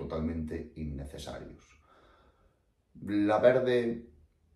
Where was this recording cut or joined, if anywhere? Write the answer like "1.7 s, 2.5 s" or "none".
none